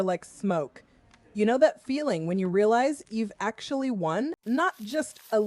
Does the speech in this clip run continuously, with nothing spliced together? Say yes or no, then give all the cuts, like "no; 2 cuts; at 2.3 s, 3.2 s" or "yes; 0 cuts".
no; 1 cut; at 4.4 s